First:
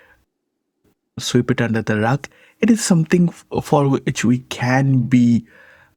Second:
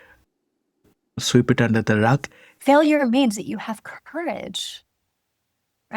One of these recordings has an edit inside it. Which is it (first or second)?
second